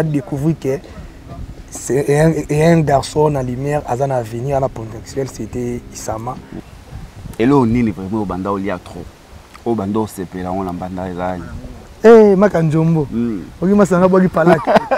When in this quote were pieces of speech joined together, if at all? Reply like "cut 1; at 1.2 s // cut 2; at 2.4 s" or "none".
cut 1; at 6.6 s